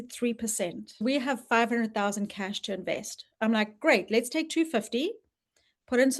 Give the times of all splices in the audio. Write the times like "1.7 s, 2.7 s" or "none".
1.0 s